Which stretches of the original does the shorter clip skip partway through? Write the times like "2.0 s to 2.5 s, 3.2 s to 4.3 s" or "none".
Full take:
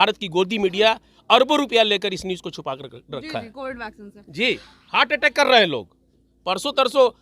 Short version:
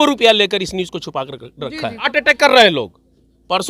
3.6 s to 5.0 s